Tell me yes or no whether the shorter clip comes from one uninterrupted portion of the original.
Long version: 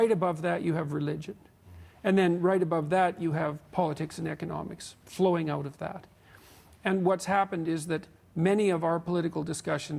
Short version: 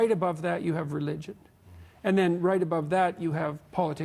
yes